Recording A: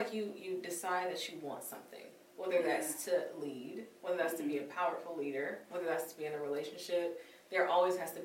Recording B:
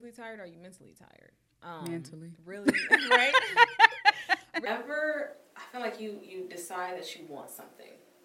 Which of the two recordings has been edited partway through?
B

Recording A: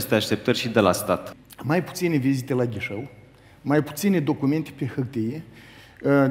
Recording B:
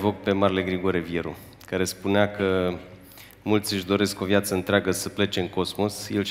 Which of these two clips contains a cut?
A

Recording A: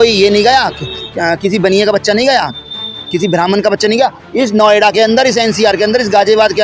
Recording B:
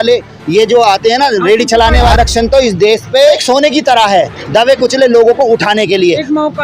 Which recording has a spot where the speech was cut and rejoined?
B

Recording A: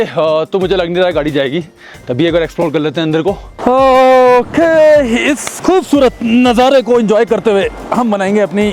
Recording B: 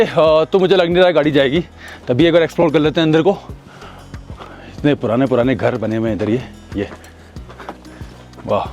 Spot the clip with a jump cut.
A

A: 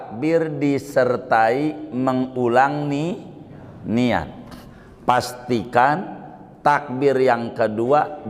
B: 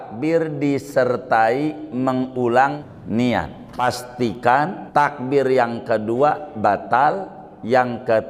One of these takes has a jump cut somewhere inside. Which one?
B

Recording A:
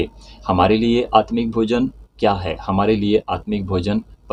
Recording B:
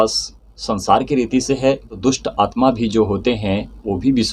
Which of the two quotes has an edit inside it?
B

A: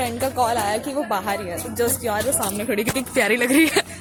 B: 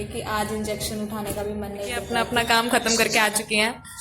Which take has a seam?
B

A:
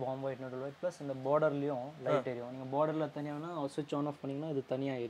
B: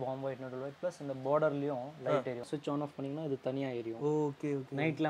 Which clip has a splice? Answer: B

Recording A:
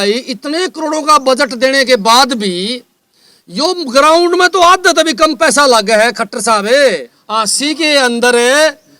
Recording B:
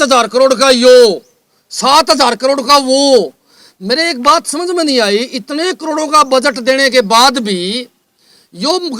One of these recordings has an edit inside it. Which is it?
A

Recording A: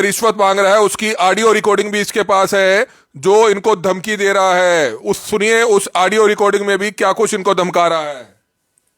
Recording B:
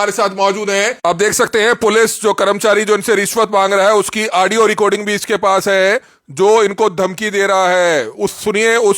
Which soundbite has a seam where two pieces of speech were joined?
B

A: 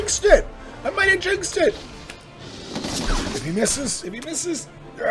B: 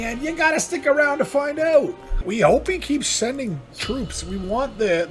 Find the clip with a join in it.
B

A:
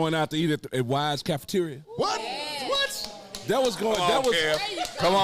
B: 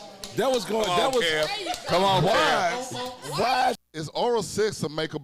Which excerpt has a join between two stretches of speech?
B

